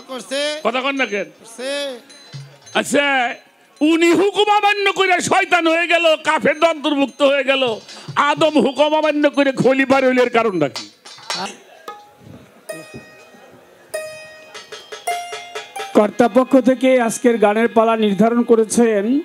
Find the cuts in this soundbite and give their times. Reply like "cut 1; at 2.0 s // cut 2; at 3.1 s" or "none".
cut 1; at 11.4 s